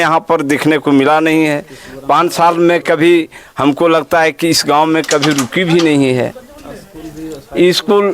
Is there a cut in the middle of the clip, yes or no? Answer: no